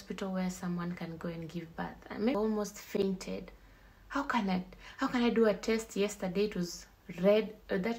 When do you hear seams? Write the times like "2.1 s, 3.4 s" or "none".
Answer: 2.3 s